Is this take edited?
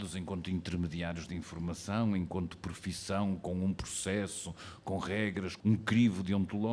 yes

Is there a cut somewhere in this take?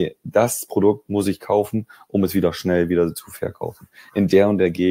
no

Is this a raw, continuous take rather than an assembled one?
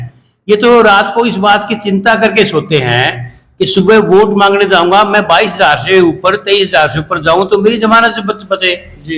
yes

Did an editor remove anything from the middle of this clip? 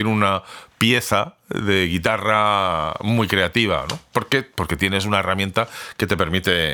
no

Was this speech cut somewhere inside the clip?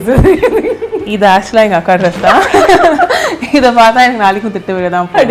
no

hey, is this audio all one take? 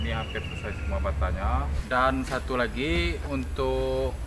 no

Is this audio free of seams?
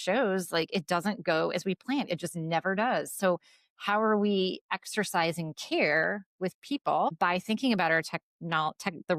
no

